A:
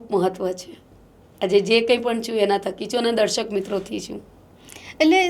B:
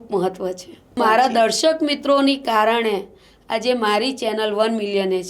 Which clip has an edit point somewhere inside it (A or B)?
B